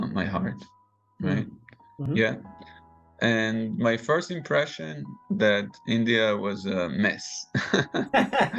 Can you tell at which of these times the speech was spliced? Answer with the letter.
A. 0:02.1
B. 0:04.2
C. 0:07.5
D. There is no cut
A